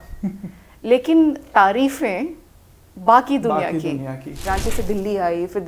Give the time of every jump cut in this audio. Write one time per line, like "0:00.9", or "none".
0:04.4